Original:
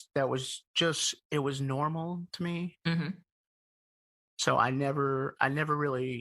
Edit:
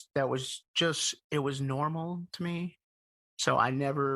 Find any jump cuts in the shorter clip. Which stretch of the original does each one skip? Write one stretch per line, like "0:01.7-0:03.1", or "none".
0:02.8-0:03.8